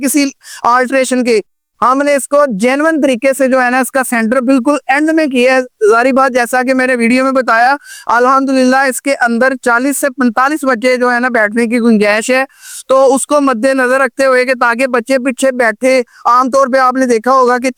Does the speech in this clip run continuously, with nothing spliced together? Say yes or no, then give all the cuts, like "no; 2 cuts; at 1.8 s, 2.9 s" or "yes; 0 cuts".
yes; 0 cuts